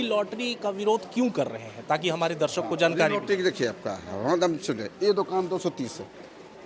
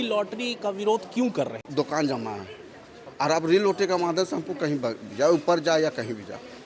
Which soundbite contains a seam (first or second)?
second